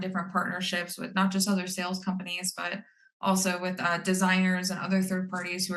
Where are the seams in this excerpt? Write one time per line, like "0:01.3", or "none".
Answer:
none